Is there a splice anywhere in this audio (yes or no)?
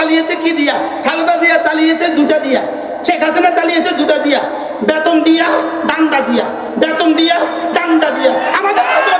no